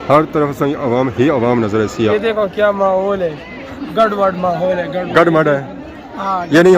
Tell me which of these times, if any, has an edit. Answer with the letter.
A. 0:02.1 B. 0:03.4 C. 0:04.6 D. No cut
A